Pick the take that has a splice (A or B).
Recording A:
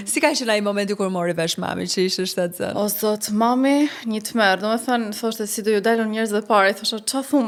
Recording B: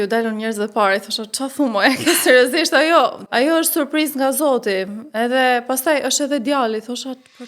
B